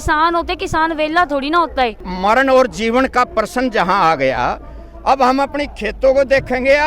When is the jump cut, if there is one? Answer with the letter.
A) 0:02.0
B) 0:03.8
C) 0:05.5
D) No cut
A